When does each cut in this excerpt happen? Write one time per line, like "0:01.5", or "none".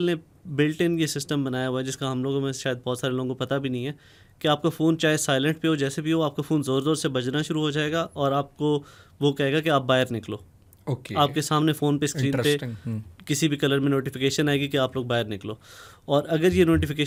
none